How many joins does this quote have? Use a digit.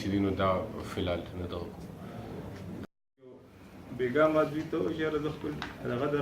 1